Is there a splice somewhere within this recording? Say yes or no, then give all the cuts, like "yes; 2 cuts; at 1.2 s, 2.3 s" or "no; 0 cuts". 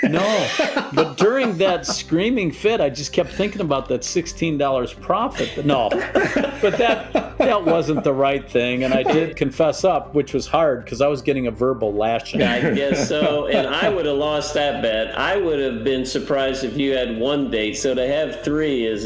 yes; 2 cuts; at 9.3 s, 12.3 s